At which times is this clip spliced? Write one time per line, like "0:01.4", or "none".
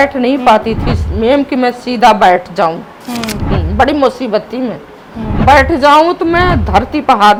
none